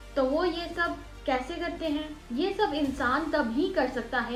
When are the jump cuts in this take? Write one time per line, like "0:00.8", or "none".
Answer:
none